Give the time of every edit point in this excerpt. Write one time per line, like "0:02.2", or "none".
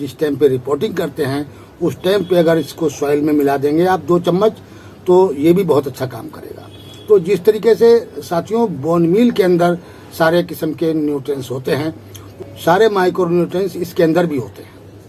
0:12.2